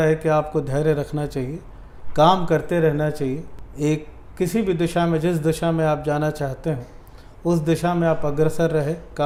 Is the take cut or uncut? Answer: uncut